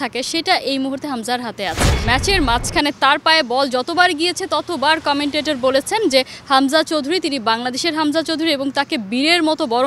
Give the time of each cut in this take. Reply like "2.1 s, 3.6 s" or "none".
1.9 s